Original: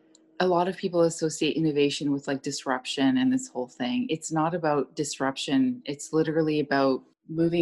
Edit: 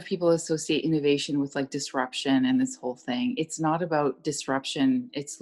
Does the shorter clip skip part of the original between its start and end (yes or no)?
no